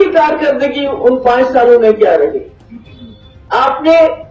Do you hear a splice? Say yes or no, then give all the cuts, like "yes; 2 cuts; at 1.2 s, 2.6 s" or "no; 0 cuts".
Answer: no; 0 cuts